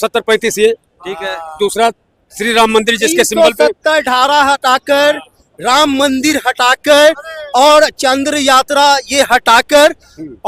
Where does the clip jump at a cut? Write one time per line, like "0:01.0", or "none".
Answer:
none